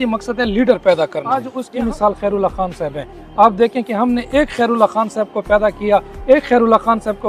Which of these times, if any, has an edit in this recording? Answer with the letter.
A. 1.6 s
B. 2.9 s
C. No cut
A